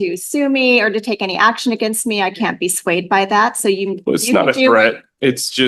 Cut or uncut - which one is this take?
uncut